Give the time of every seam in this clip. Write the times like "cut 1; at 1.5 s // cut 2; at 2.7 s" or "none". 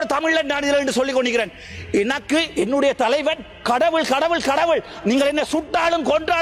none